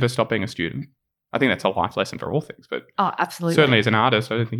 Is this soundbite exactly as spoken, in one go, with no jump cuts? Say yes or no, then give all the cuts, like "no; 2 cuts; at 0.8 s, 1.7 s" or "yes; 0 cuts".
yes; 0 cuts